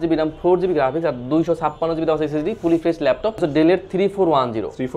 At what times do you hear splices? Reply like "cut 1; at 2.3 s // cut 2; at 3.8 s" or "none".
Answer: cut 1; at 3.4 s